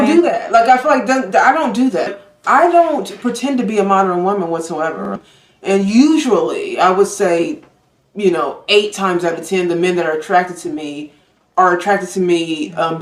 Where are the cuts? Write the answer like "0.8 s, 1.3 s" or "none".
5.1 s